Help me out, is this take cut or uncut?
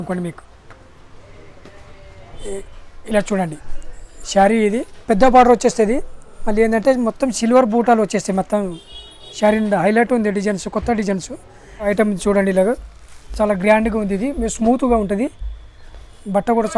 cut